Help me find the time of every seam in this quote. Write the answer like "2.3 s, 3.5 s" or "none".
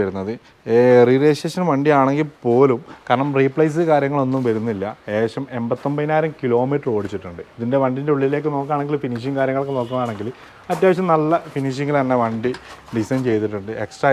none